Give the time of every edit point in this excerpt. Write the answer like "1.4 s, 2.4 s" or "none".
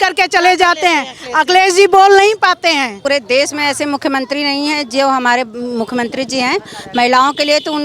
3.0 s